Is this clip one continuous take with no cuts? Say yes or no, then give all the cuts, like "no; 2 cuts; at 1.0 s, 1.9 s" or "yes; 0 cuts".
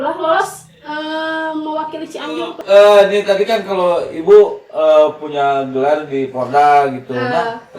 no; 1 cut; at 2.6 s